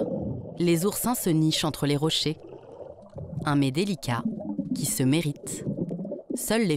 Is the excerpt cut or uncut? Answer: uncut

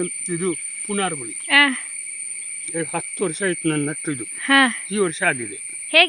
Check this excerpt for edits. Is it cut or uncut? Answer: uncut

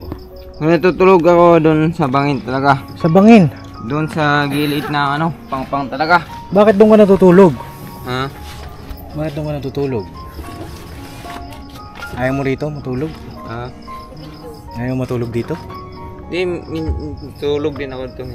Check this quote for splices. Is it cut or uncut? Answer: uncut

